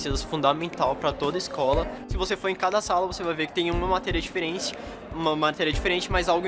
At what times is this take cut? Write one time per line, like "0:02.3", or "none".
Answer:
0:02.0